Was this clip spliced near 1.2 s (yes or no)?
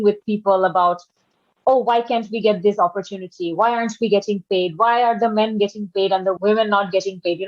no